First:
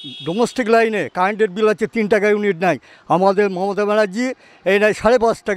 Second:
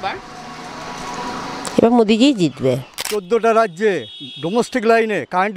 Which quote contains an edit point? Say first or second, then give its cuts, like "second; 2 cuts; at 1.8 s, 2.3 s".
second; 1 cut; at 3.1 s